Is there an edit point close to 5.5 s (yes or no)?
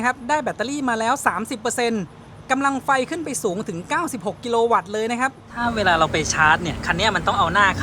yes